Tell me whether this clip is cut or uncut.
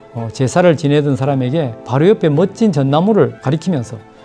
cut